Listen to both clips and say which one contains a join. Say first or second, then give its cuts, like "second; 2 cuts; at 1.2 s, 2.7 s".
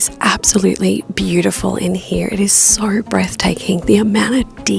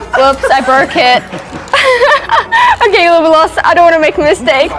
second; 1 cut; at 1.4 s